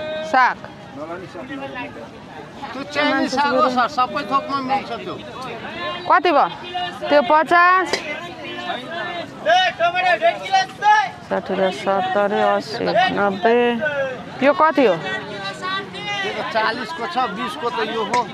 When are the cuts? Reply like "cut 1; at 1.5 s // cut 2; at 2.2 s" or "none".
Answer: none